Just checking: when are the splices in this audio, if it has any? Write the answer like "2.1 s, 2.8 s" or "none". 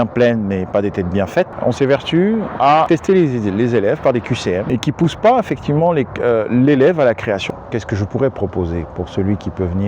1.5 s, 2.9 s, 4.6 s, 7.4 s